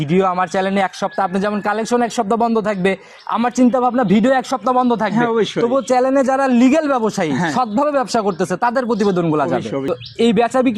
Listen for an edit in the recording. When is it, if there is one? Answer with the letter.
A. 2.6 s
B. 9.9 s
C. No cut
B